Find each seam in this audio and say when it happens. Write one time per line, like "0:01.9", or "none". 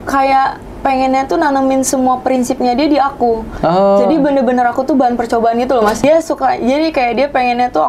0:06.0